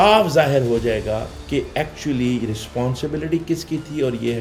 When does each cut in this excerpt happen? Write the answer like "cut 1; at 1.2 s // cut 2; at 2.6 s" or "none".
none